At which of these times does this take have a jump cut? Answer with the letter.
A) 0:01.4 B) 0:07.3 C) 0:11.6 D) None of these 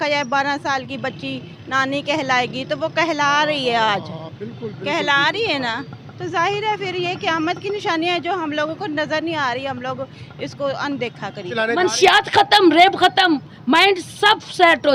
C